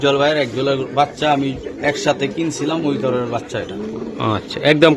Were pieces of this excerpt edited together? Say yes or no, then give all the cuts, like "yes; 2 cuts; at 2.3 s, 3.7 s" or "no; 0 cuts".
no; 0 cuts